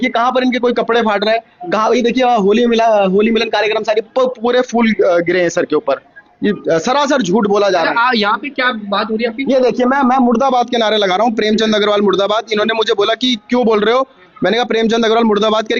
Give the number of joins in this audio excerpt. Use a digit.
0